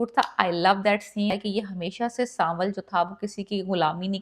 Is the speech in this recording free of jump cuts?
no; 1 cut; at 1.3 s

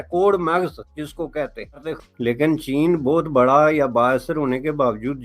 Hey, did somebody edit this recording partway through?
yes; 1 cut; at 2.0 s

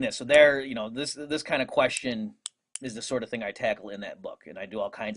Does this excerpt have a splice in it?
yes; 1 cut; at 2.1 s

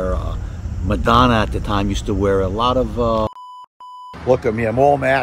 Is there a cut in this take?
yes; 1 cut; at 3.5 s

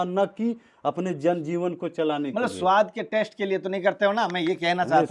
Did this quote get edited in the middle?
no; 0 cuts

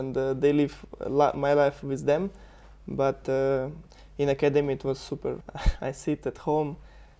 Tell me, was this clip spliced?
yes; 1 cut; at 5.5 s

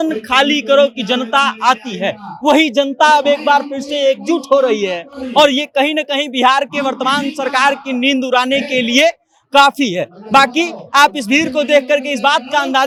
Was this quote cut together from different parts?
no; 0 cuts

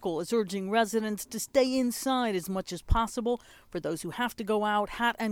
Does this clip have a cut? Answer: no; 0 cuts

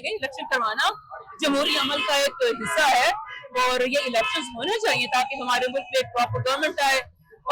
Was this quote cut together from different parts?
no; 0 cuts

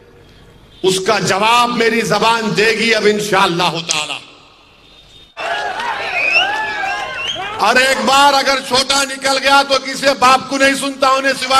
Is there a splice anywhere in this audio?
yes; 1 cut; at 5.4 s

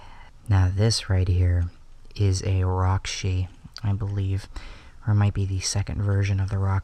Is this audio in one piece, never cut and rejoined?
yes; 0 cuts

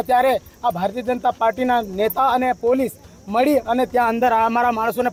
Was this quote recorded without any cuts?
yes; 0 cuts

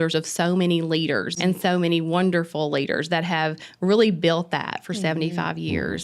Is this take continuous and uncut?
no; 1 cut; at 1.3 s

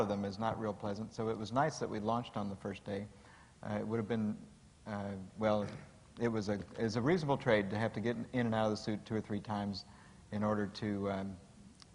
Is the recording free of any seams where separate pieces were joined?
yes; 0 cuts

